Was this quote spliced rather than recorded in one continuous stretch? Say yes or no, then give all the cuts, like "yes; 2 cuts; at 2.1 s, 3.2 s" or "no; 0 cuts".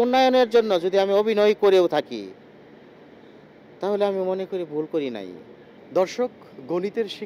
no; 0 cuts